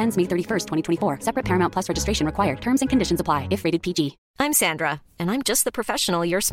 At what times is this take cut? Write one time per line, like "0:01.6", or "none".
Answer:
0:04.2

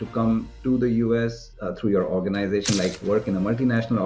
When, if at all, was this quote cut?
0:01.5

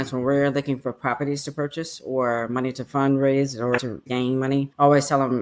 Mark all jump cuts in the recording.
0:04.0

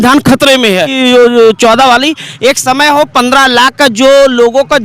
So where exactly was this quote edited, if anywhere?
0:01.0

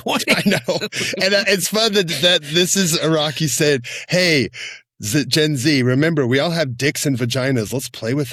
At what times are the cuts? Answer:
none

